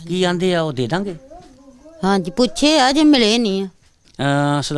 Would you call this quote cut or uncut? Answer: cut